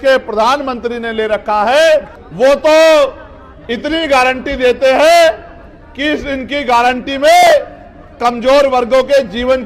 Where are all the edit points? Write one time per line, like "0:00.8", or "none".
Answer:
0:02.2